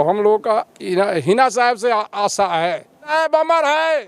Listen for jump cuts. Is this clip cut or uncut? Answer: cut